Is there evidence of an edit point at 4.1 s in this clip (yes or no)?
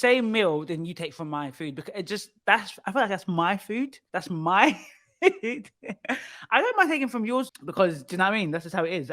yes